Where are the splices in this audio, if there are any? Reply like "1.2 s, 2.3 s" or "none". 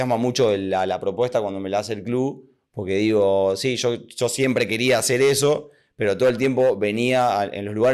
none